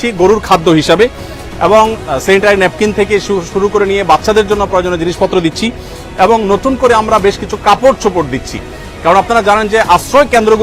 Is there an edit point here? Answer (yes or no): no